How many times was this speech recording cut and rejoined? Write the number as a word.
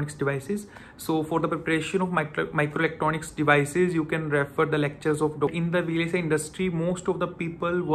one